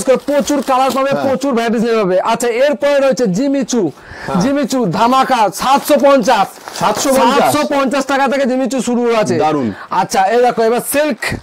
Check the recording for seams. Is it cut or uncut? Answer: uncut